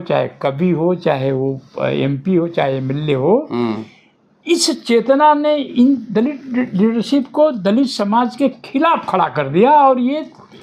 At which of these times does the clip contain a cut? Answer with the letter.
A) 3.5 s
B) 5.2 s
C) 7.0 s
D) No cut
D